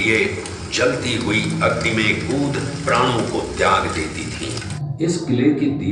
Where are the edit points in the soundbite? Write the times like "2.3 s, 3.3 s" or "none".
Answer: 4.8 s

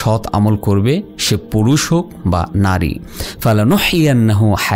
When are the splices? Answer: none

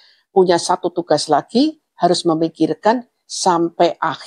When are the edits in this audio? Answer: none

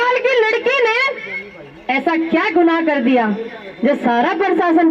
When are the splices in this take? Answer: none

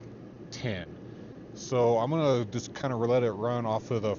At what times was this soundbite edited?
none

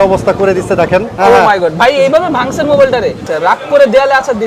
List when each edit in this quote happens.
1.1 s, 3.2 s

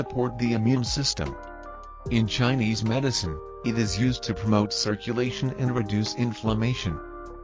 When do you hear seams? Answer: 3.7 s

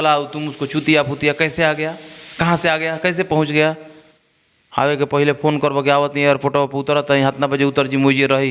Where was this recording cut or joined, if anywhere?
none

